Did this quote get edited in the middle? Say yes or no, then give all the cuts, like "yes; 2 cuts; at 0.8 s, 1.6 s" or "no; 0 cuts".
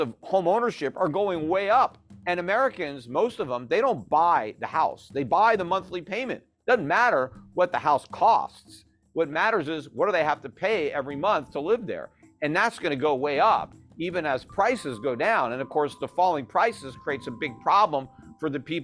yes; 1 cut; at 2.1 s